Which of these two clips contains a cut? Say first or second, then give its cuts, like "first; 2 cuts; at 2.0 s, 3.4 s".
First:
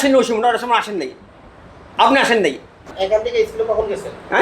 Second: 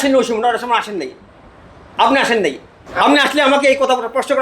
first; 1 cut; at 2.9 s